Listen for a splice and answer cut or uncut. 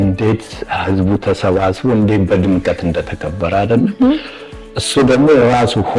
uncut